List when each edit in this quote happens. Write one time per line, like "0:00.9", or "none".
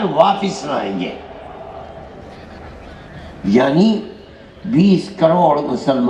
none

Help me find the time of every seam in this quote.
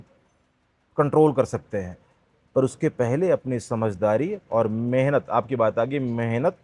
none

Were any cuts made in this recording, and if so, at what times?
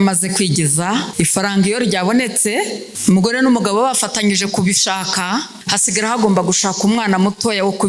0:01.1
0:02.9
0:05.6

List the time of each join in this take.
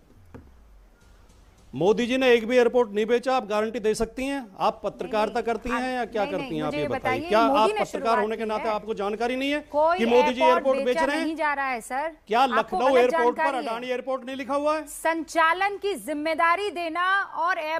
none

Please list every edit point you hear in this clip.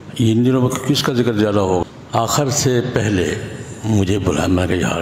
0:01.8

